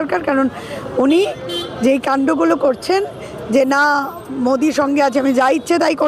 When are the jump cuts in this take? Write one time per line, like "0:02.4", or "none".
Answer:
none